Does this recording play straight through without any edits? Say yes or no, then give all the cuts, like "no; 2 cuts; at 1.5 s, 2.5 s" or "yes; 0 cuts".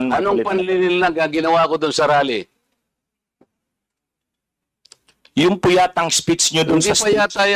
yes; 0 cuts